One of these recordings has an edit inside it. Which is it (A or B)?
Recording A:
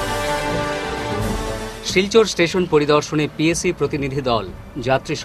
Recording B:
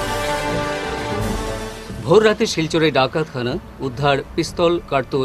B